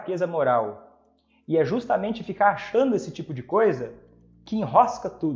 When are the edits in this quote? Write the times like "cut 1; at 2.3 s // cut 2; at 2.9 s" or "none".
none